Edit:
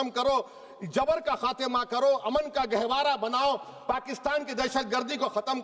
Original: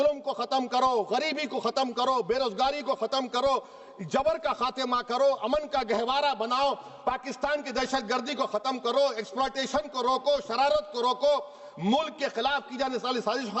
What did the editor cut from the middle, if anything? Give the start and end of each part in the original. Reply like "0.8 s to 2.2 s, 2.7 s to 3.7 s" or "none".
none